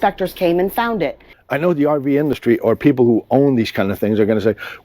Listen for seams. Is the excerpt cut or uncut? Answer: cut